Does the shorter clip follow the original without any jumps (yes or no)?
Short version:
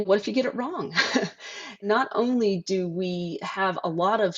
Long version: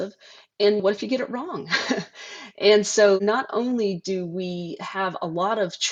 no